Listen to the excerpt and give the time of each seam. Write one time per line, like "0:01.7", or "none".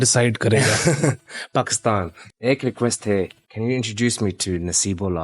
0:02.2
0:03.4